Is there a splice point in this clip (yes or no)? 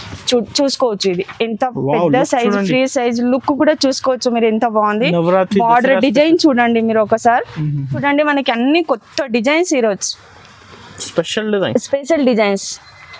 yes